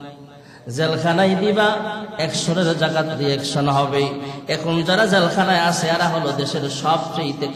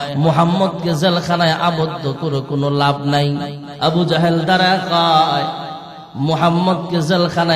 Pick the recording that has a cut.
second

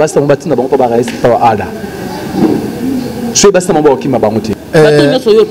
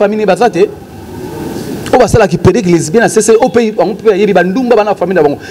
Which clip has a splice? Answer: first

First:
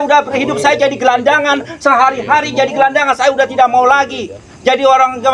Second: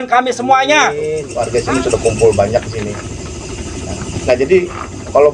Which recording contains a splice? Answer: second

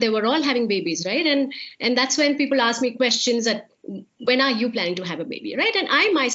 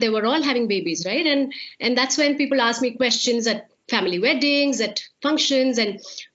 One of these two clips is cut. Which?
first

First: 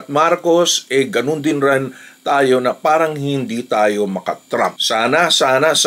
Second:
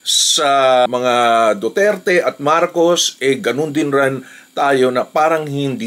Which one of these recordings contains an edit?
first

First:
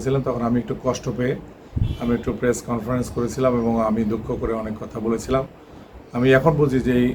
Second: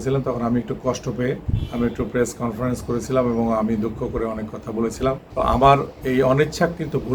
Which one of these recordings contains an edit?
second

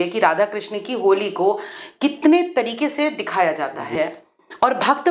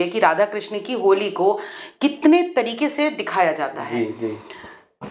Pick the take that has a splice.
first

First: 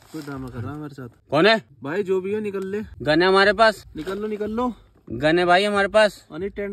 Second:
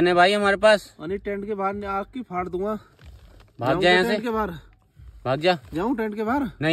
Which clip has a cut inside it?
first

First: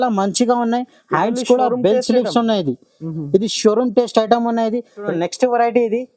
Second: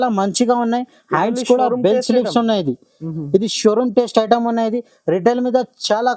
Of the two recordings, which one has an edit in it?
first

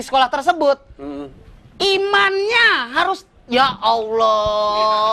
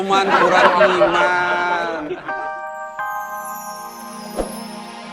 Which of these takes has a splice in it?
second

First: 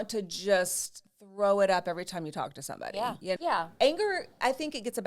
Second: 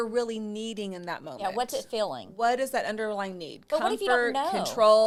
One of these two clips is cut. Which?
first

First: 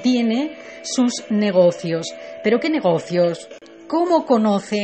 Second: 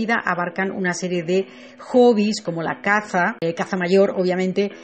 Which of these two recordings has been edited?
first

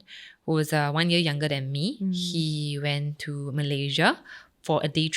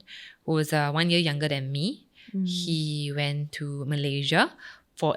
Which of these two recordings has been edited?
first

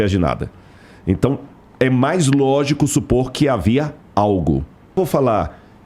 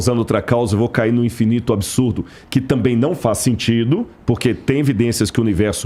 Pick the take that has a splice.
first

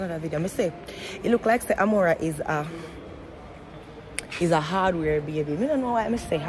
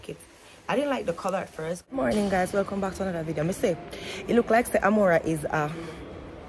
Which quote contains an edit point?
second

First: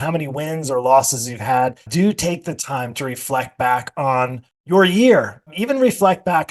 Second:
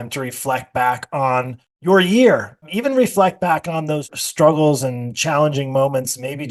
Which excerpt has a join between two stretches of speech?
first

